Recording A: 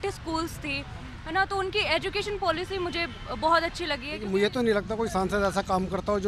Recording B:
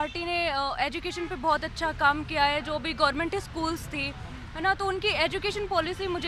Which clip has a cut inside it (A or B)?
A